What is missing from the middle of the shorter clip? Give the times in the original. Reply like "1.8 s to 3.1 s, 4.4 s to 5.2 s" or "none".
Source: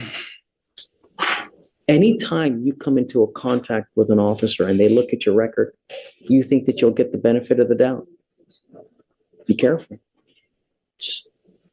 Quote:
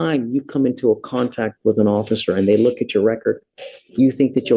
none